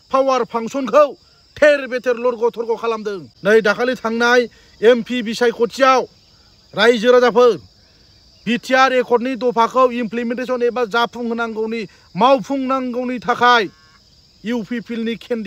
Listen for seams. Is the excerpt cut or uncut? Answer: cut